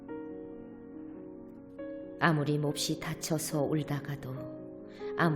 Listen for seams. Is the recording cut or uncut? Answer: cut